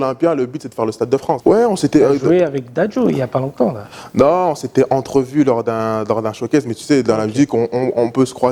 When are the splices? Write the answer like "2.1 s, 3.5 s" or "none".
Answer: 1.4 s

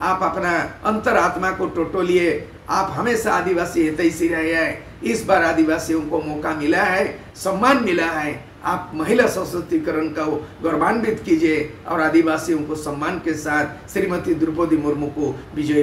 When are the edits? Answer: none

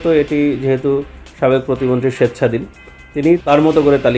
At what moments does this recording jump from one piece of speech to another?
none

